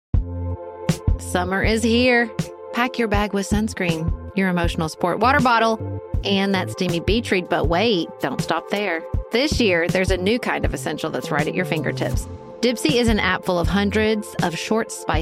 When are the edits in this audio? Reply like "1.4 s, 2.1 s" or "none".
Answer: 0.9 s